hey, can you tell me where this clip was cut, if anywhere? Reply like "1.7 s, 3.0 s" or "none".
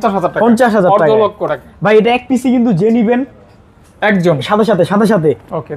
none